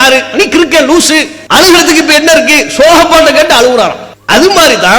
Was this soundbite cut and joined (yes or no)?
yes